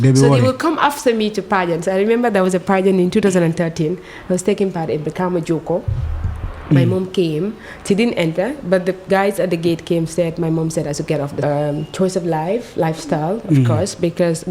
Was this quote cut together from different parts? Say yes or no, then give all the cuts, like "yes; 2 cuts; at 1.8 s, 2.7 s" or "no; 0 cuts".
yes; 1 cut; at 11.4 s